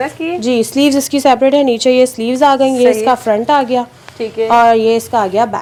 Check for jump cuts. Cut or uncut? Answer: uncut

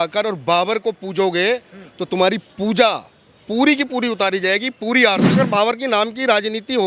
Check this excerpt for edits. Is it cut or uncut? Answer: cut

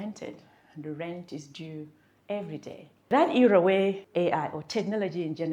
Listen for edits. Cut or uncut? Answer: cut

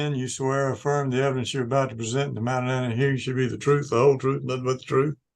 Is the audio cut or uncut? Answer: uncut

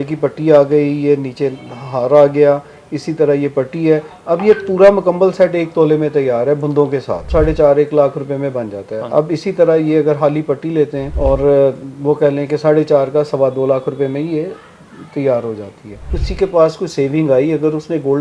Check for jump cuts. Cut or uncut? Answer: cut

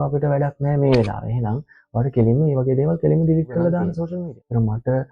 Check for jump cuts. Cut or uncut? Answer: cut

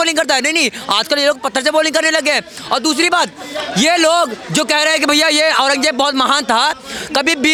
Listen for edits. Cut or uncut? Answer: uncut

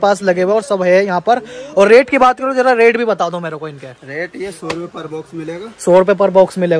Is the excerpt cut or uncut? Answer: uncut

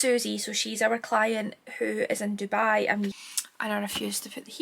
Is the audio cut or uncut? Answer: cut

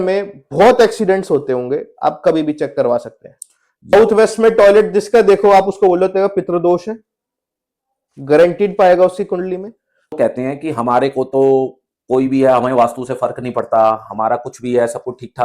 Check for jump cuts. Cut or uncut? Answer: cut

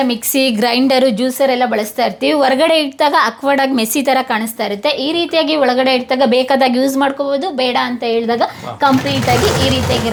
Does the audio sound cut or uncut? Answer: uncut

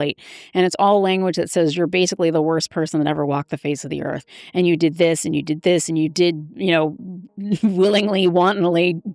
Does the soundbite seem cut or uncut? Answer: uncut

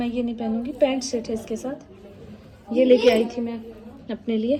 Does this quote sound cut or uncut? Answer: uncut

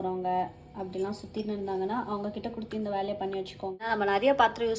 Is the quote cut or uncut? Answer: cut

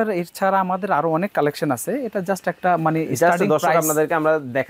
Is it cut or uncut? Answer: uncut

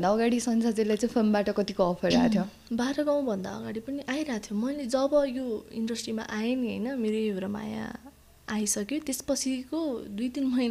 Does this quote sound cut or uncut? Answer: uncut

